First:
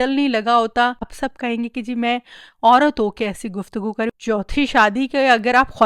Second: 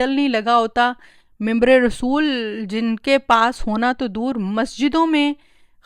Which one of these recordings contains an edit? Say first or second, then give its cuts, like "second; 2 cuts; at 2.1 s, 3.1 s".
first; 2 cuts; at 1.2 s, 4.1 s